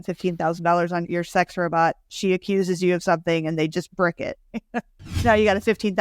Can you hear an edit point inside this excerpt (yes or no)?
yes